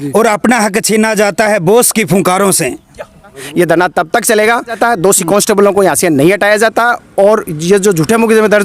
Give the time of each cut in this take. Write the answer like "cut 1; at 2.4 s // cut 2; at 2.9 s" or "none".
cut 1; at 3.4 s // cut 2; at 4.8 s